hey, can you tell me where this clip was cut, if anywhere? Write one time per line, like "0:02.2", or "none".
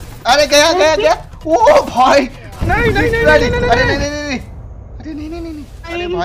none